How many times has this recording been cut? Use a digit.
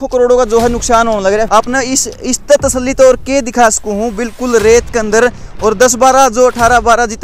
1